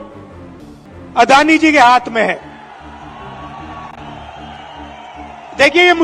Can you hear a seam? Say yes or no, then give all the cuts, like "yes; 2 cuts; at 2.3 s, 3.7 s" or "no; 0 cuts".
no; 0 cuts